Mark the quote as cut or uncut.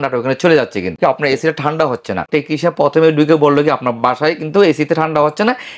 cut